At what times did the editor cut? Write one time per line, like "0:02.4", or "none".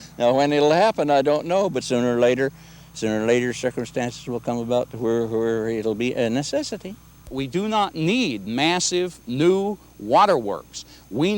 0:07.4